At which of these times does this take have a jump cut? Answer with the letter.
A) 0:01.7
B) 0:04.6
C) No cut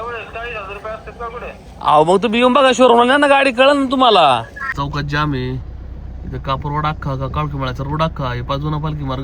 B